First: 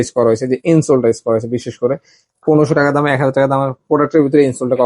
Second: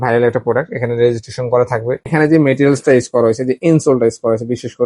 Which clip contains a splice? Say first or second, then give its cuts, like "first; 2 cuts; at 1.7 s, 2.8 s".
second; 1 cut; at 2.0 s